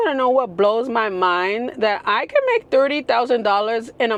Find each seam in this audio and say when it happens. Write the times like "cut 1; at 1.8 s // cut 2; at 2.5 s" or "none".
none